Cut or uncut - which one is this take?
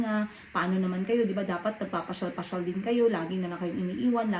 uncut